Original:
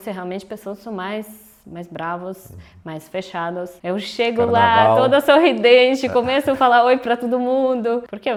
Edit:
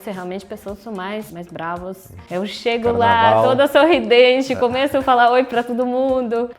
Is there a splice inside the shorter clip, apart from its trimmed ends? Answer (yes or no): yes